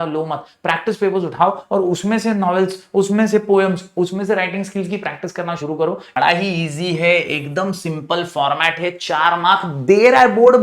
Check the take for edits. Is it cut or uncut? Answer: cut